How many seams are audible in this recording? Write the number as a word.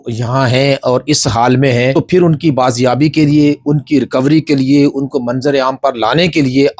one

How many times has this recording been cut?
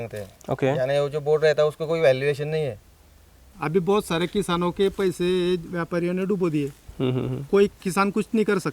one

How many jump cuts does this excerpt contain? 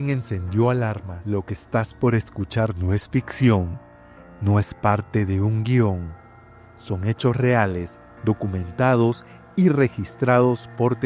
one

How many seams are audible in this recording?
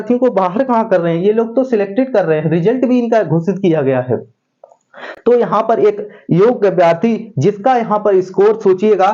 zero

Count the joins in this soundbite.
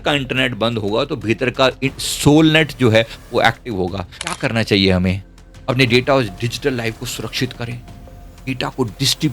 one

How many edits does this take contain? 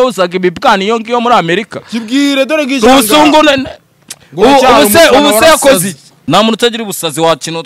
one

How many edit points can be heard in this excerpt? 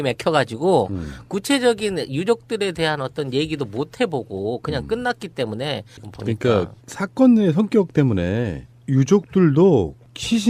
one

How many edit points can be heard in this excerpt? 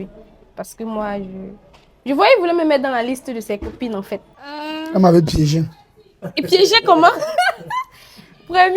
one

